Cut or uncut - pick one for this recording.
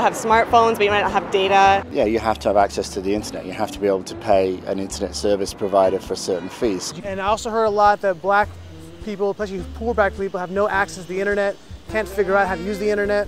cut